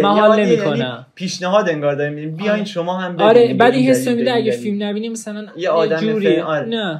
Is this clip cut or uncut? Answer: uncut